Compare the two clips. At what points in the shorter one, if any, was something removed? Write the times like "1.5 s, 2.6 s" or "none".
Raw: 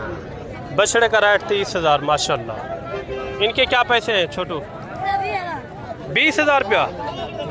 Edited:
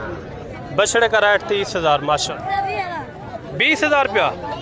2.2 s